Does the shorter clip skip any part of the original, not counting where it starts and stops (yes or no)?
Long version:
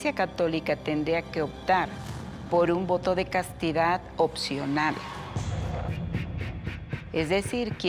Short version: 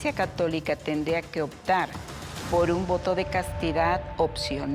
no